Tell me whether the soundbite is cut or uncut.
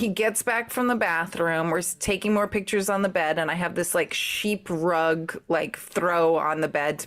uncut